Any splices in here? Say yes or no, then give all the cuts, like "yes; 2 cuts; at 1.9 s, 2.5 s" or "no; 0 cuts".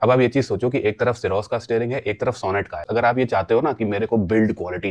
yes; 1 cut; at 2.9 s